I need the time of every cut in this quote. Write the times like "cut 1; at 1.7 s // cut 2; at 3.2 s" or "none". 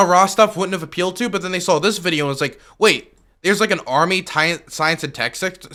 none